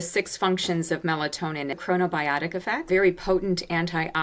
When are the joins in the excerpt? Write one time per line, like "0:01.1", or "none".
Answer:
0:01.8
0:02.9